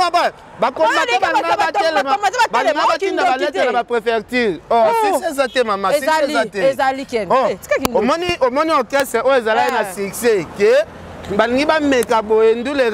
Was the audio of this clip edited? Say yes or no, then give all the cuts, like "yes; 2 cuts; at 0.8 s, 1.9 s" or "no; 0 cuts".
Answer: no; 0 cuts